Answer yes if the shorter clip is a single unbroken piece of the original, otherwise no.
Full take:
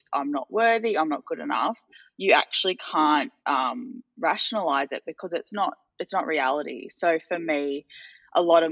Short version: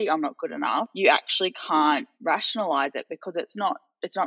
no